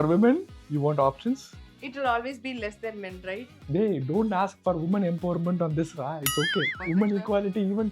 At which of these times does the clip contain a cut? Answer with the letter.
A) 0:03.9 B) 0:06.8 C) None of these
B